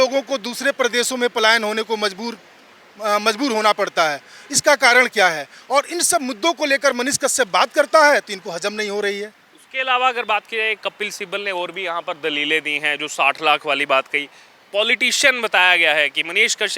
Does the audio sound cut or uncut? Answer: uncut